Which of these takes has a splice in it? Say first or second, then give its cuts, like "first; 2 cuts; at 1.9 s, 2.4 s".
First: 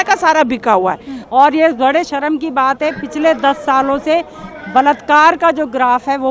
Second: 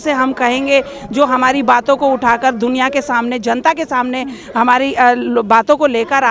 first; 1 cut; at 1.1 s